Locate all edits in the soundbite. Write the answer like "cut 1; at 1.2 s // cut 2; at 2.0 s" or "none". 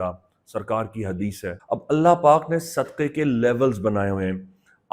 cut 1; at 1.6 s